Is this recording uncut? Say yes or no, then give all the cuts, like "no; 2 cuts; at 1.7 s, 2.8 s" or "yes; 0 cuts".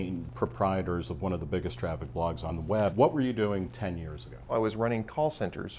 no; 2 cuts; at 2.6 s, 4.5 s